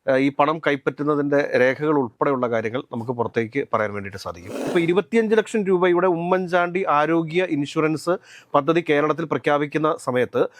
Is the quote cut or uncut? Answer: cut